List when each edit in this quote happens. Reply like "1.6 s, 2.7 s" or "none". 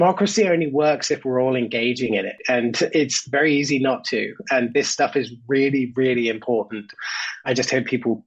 none